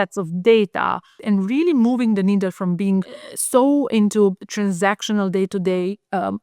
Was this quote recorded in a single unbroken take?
no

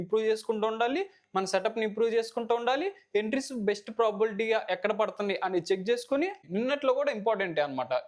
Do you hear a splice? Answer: yes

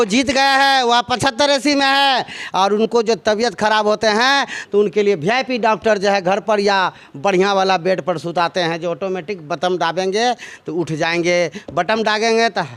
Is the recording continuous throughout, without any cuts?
yes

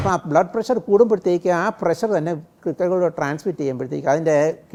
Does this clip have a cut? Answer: no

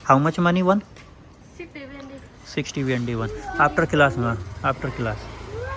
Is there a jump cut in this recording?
no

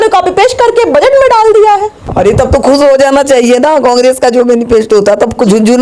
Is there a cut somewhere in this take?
no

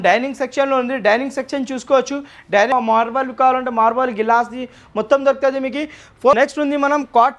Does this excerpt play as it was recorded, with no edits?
no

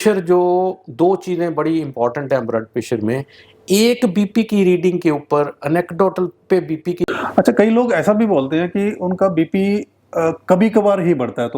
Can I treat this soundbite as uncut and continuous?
no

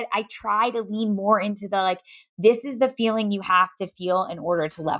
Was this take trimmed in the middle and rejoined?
no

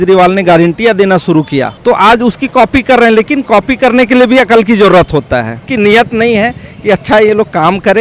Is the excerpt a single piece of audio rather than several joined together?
no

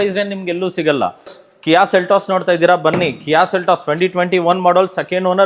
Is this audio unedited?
no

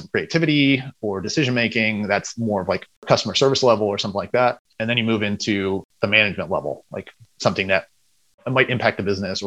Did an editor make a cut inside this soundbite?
yes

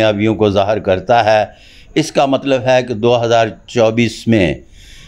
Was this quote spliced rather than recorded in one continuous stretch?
no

